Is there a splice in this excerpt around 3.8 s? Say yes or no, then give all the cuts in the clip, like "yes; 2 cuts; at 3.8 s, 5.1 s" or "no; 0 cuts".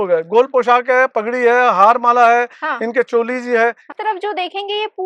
yes; 1 cut; at 3.8 s